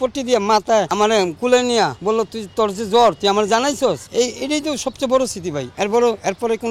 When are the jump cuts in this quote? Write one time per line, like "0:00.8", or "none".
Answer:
0:00.9
0:02.0
0:04.0
0:05.7